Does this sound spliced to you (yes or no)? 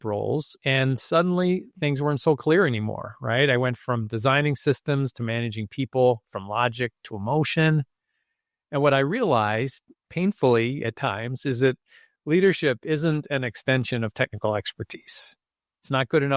no